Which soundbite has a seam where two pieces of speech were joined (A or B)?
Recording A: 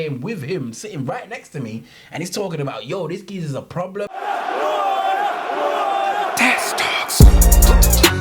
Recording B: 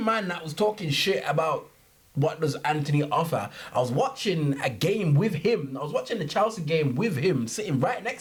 A